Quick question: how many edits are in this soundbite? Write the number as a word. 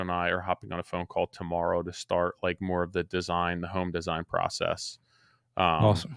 zero